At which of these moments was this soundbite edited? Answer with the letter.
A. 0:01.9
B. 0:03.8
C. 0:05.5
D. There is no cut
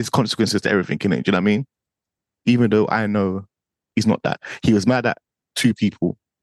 B